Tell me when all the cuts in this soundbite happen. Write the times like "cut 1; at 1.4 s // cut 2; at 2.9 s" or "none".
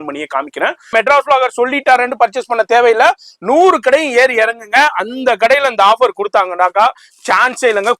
cut 1; at 0.9 s